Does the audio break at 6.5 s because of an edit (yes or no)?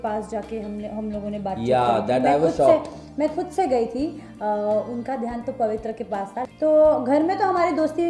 yes